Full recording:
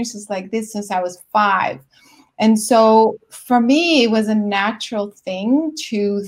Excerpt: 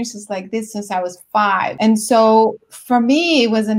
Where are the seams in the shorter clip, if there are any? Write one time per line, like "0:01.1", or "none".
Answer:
0:01.7